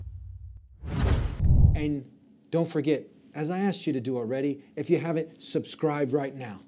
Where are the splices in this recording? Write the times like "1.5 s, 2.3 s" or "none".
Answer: 1.3 s